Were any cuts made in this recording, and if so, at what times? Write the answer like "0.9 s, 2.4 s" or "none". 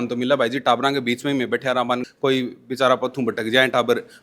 2.1 s